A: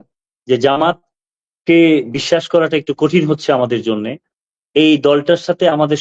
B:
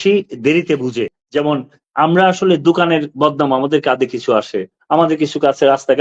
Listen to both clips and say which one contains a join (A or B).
B